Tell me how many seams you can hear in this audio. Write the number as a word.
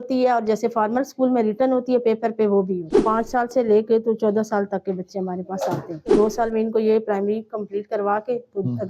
two